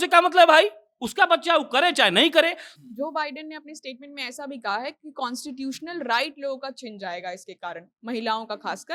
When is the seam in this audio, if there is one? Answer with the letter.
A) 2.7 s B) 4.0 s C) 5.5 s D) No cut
A